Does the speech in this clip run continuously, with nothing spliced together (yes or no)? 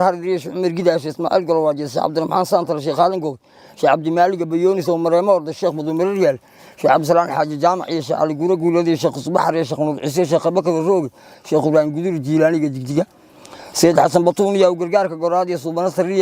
yes